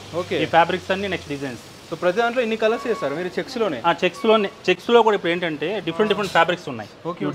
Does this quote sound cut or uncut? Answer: uncut